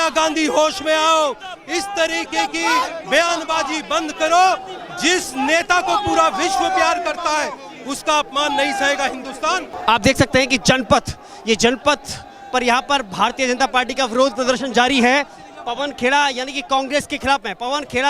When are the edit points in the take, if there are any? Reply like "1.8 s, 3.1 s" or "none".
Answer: 9.7 s